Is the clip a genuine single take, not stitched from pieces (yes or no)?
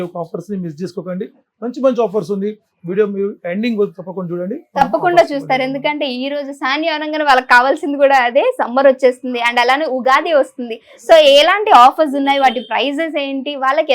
yes